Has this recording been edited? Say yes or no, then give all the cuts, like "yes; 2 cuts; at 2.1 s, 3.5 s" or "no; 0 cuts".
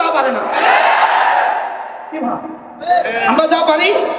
no; 0 cuts